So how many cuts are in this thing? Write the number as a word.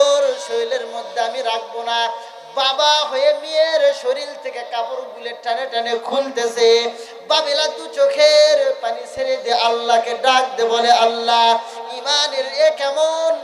zero